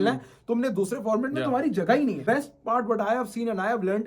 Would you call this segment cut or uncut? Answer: cut